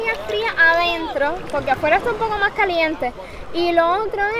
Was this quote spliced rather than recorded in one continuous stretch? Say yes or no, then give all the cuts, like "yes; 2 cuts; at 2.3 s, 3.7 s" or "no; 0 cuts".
no; 0 cuts